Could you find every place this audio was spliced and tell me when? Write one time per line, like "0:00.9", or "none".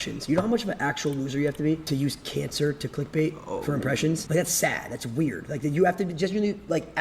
0:01.8
0:04.2
0:05.6